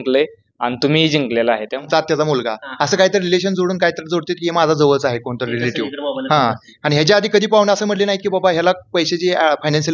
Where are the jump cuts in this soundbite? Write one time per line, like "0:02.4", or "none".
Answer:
0:01.9